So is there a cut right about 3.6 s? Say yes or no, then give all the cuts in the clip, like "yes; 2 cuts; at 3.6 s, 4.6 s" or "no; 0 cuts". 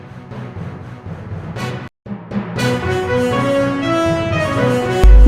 no; 1 cut; at 1.6 s